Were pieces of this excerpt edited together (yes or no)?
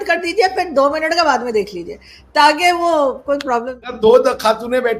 yes